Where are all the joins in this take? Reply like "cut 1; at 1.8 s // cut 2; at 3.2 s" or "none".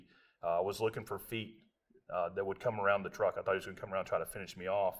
none